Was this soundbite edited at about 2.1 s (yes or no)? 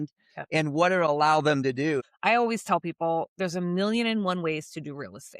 yes